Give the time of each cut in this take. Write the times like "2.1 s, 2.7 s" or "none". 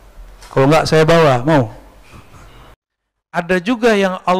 2.8 s